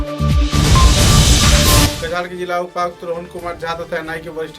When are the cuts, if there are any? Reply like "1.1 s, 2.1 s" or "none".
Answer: 1.9 s